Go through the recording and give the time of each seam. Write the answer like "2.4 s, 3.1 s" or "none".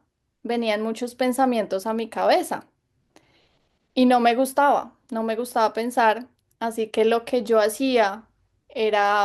none